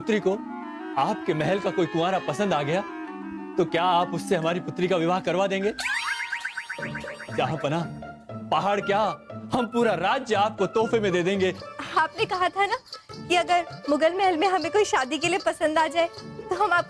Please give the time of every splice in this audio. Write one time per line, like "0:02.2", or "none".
0:11.7